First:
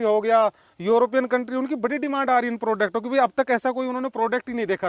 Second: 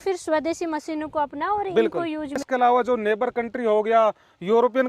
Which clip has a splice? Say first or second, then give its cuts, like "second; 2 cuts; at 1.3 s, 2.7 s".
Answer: second; 1 cut; at 2.4 s